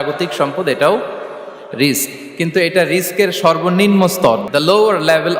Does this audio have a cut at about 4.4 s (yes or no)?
yes